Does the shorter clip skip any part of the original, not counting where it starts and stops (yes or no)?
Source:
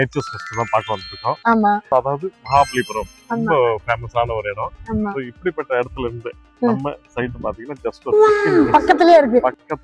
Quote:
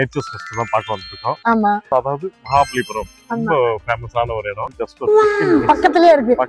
yes